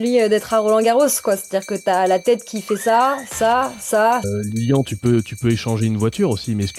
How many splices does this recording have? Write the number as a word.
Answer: one